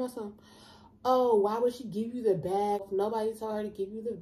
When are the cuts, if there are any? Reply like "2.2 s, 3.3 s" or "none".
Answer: 2.9 s